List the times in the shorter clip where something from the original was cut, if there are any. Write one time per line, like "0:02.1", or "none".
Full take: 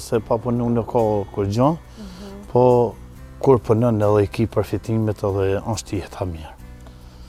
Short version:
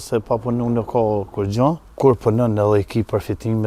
0:01.9